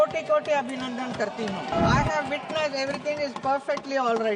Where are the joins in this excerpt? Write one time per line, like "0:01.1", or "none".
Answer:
0:01.7